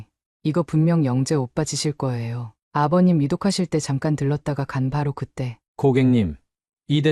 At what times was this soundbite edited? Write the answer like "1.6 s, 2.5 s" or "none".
5.6 s